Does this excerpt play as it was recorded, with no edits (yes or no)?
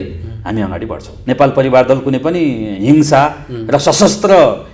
no